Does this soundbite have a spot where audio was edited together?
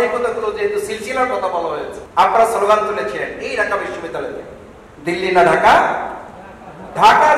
yes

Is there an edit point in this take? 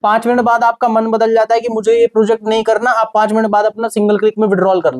no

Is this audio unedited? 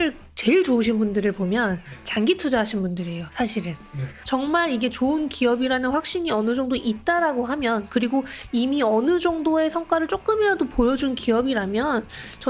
no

